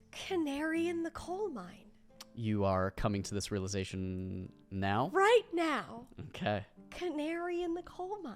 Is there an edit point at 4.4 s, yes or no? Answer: no